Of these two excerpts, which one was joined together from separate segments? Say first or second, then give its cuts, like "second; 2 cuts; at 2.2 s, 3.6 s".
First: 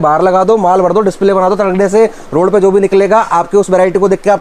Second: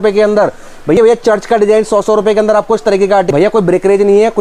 second; 2 cuts; at 1.0 s, 3.3 s